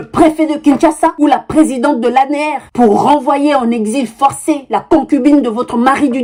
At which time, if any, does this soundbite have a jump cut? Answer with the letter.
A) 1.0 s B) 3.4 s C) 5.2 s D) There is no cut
D